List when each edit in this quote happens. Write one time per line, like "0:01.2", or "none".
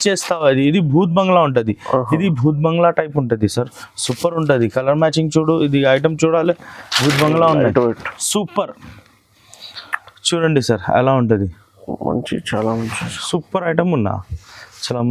none